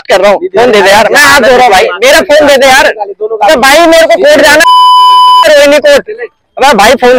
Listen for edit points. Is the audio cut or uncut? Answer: uncut